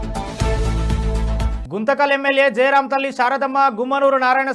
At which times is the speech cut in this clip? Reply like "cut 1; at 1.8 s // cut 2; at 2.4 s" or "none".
cut 1; at 1.6 s